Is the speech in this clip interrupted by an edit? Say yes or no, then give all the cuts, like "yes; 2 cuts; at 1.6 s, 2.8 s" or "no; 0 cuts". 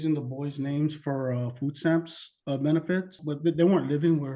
yes; 1 cut; at 3.2 s